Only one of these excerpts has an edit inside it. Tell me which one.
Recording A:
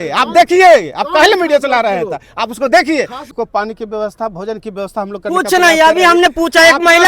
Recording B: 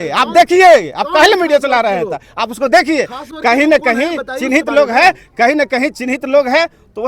A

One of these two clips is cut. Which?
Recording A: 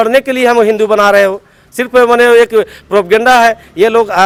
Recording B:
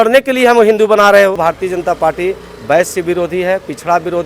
B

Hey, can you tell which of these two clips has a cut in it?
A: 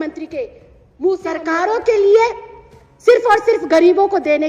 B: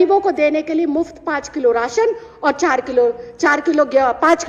A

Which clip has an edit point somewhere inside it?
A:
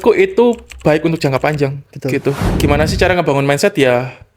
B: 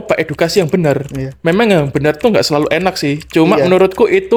A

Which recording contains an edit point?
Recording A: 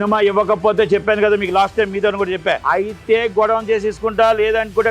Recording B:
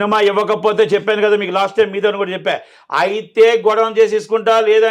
A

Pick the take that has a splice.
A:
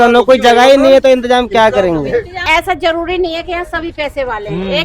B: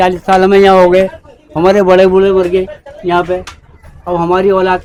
A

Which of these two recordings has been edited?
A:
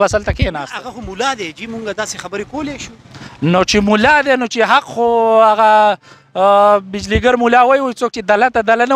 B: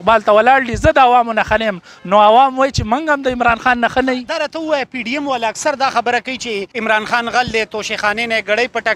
B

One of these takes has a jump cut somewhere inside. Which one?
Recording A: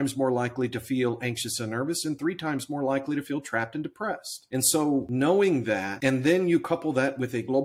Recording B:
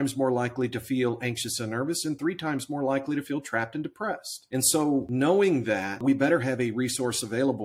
B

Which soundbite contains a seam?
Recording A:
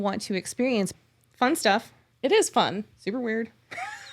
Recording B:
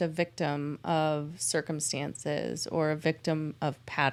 A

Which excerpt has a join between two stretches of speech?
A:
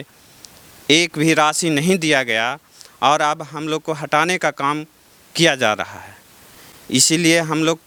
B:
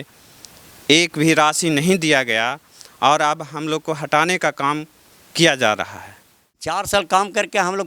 B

